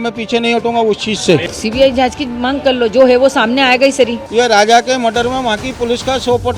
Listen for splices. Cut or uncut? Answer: cut